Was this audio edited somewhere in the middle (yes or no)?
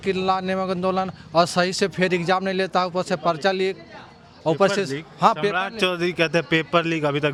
no